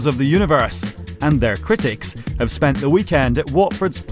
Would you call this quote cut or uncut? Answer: cut